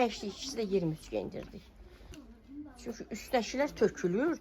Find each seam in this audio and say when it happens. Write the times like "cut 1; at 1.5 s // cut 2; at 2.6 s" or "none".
cut 1; at 2.2 s

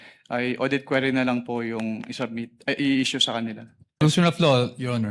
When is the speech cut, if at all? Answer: cut 1; at 4.0 s

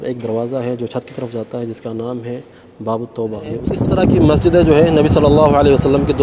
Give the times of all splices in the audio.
cut 1; at 3.7 s

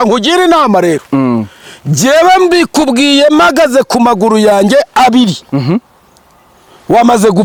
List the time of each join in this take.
none

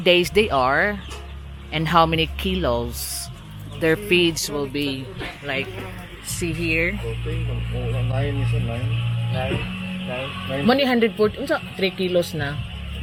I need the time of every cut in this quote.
none

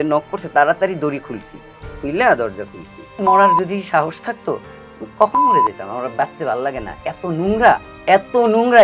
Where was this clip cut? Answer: cut 1; at 3.2 s // cut 2; at 7.9 s

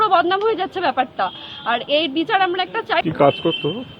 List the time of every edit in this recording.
cut 1; at 3.0 s

